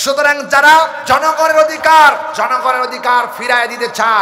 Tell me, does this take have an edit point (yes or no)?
yes